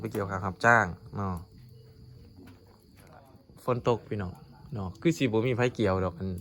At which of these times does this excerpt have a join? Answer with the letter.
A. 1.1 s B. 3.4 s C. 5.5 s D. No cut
B